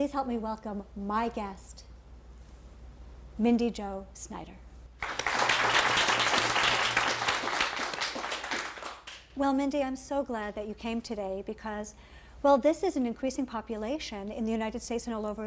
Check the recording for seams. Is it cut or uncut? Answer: cut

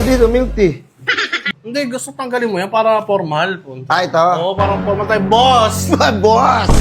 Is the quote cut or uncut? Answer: cut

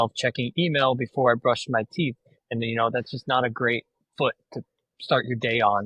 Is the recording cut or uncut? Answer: uncut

